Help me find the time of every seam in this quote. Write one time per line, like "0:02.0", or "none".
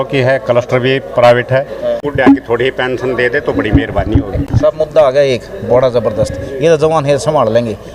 0:02.3
0:04.4